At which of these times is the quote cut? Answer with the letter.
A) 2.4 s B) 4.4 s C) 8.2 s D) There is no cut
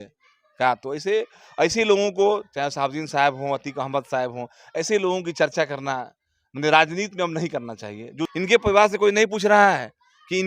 C